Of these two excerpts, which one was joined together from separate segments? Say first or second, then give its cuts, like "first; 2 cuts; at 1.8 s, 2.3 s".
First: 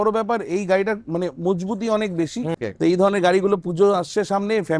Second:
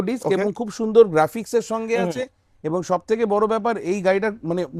first; 1 cut; at 2.5 s